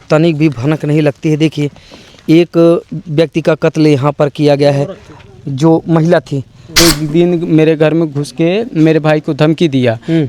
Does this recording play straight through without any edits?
no; 1 cut; at 6.6 s

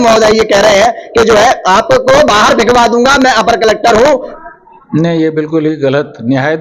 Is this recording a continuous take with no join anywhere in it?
no; 1 cut; at 4.3 s

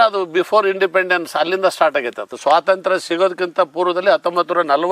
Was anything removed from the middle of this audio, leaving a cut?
yes; 1 cut; at 2.3 s

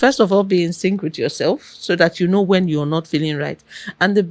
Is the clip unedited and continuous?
yes; 0 cuts

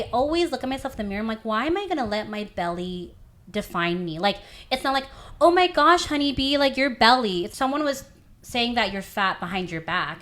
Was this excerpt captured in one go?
no; 1 cut; at 7.5 s

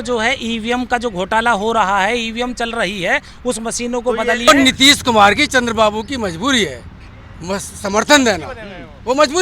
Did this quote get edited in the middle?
yes; 1 cut; at 4.5 s

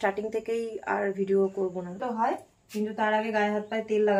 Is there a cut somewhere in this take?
yes; 1 cut; at 2.0 s

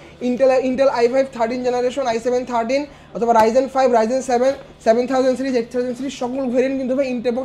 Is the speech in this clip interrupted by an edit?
no; 0 cuts

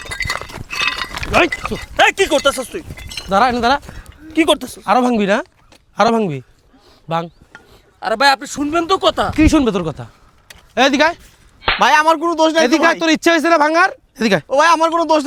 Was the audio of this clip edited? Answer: no; 0 cuts

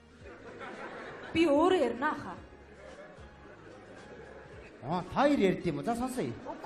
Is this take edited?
no; 0 cuts

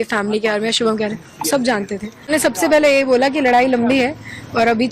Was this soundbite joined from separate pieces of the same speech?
yes; 1 cut; at 2.3 s

